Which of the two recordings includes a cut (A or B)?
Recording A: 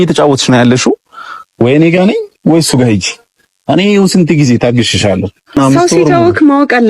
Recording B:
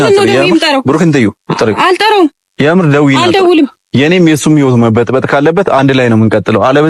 A